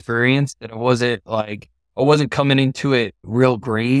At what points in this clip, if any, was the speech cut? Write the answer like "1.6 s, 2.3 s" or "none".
none

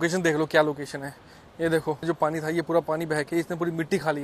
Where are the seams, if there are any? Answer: 2.0 s

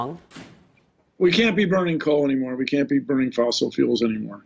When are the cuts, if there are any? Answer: 2.8 s

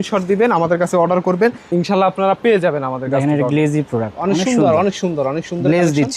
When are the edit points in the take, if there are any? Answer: none

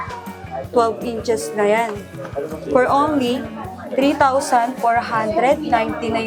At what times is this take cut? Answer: none

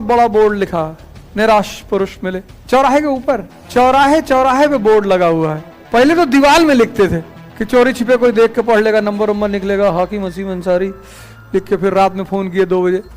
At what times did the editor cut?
3.5 s, 5.8 s

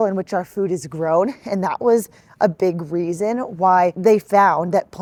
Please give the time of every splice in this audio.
none

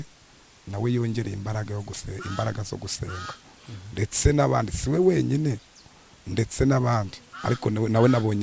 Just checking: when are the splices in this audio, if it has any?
none

